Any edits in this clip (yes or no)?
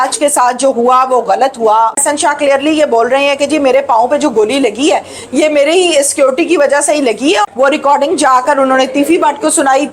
yes